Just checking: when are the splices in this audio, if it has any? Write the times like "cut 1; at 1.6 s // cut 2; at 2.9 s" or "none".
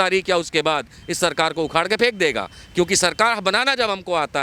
none